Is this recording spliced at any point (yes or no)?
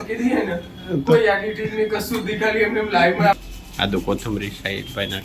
yes